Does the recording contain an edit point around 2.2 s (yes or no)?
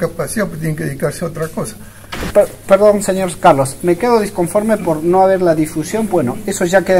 yes